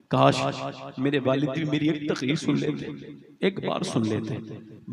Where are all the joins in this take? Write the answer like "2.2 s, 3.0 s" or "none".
none